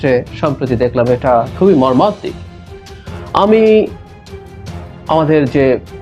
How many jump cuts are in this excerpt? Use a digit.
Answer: 0